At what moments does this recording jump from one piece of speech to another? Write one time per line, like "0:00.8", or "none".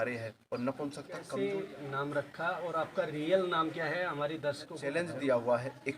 0:01.2
0:04.7